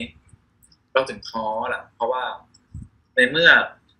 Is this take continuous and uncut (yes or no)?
yes